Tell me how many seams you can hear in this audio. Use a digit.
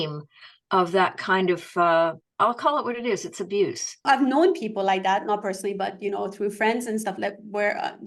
1